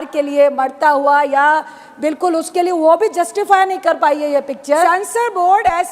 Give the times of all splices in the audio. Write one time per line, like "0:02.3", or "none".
0:04.9